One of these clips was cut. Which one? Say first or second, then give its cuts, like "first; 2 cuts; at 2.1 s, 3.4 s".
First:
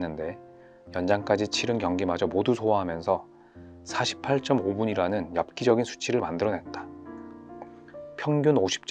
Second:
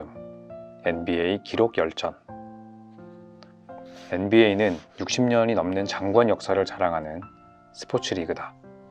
first; 2 cuts; at 6.6 s, 8.1 s